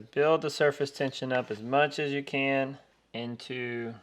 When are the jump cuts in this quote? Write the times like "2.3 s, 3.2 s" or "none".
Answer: 2.9 s

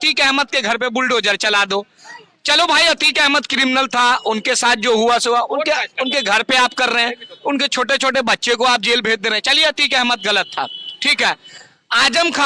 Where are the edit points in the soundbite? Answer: none

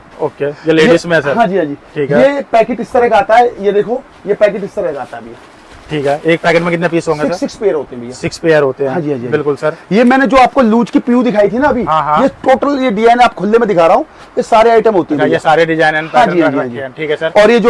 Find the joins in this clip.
none

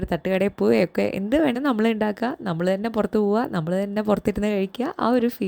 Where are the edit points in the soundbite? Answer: 1.6 s

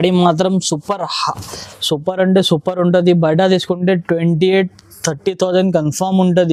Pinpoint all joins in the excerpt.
none

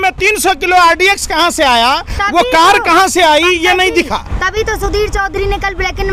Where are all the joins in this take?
none

